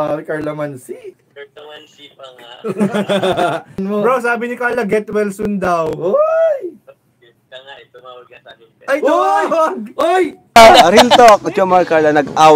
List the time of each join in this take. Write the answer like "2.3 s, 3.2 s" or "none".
1.3 s, 3.8 s, 10.4 s